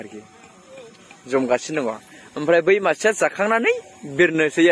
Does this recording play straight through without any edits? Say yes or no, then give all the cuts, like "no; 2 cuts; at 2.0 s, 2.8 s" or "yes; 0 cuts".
yes; 0 cuts